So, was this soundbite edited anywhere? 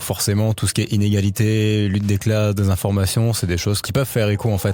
yes; 1 cut; at 3.8 s

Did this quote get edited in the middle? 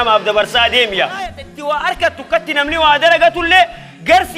yes; 1 cut; at 1.5 s

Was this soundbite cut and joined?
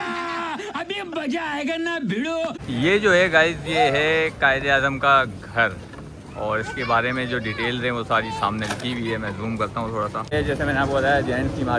yes; 2 cuts; at 2.6 s, 10.3 s

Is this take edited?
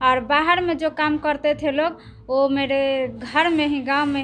no; 0 cuts

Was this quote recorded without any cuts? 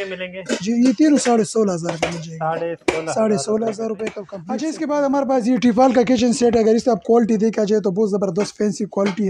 yes; 0 cuts

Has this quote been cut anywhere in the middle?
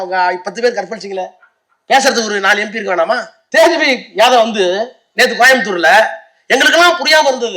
yes; 1 cut; at 3.3 s

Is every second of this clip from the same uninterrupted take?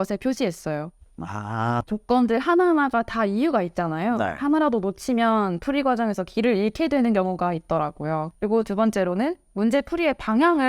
no; 2 cuts; at 1.9 s, 8.3 s

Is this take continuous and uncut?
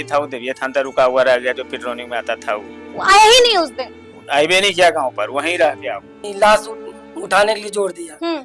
no; 1 cut; at 6.2 s

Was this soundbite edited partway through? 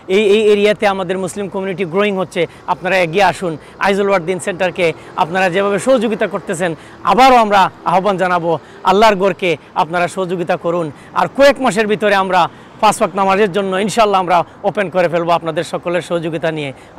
no; 0 cuts

